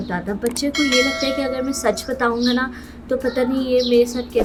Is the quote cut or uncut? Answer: uncut